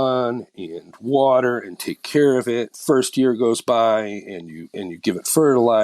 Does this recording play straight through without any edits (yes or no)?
no